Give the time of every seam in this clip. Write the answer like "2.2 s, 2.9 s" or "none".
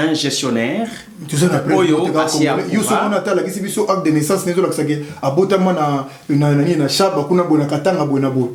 none